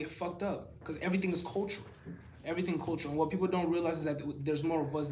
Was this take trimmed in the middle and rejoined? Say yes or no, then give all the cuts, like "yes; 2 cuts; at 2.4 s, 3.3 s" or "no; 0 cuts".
no; 0 cuts